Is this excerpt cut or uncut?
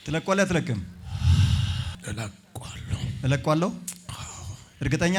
uncut